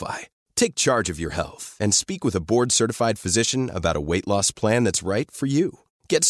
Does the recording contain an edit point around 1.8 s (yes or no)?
no